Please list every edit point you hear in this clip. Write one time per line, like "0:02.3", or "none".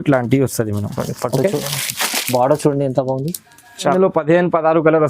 0:03.9